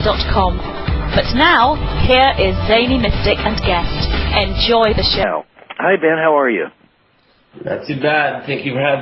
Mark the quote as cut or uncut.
uncut